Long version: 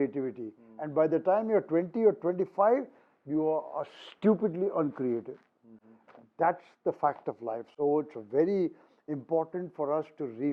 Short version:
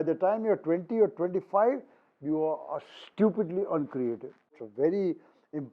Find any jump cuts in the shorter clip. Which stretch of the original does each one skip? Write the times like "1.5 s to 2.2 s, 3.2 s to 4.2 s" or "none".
5.7 s to 8.2 s